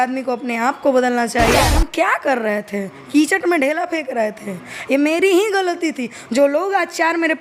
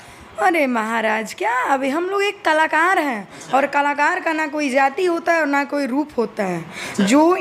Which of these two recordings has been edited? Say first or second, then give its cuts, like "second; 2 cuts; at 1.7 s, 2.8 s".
first; 1 cut; at 1.7 s